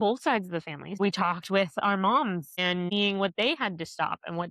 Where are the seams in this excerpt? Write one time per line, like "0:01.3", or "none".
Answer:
0:01.0
0:02.9